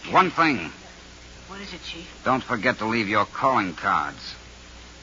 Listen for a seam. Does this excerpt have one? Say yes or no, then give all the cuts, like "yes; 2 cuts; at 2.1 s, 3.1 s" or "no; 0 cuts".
yes; 1 cut; at 3.4 s